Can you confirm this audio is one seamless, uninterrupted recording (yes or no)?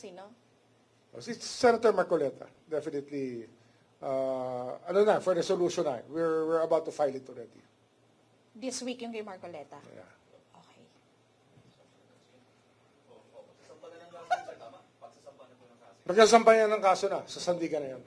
yes